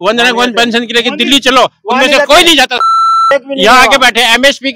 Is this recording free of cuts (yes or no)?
yes